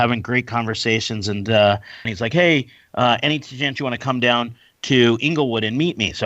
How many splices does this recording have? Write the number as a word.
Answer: one